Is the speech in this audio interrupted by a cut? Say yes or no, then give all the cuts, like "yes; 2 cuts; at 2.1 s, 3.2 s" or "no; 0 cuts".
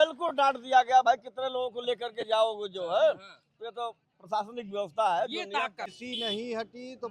yes; 1 cut; at 5.9 s